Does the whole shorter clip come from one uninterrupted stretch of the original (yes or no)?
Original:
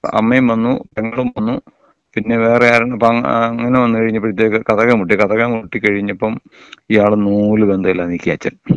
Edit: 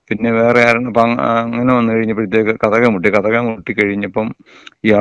yes